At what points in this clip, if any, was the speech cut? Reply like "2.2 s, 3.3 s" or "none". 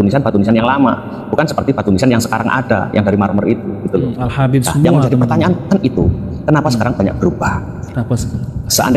none